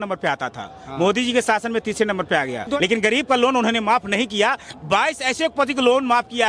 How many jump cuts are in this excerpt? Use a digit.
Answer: 1